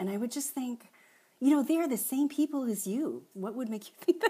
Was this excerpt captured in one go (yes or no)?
no